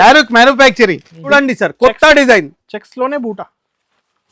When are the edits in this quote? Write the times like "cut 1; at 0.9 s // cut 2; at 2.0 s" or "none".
cut 1; at 1.2 s